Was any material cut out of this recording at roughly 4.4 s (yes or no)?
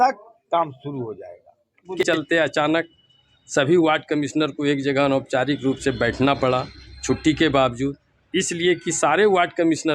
no